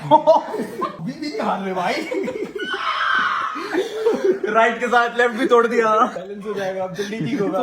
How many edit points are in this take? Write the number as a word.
two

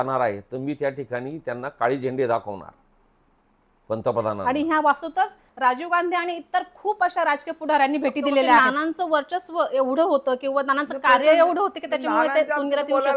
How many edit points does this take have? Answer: two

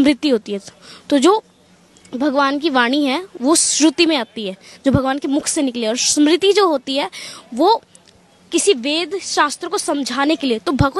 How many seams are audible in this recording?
zero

